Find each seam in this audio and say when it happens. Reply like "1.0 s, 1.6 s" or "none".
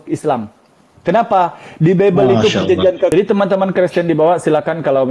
3.1 s